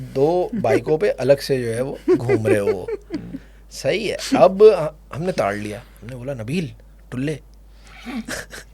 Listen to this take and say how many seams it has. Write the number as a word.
zero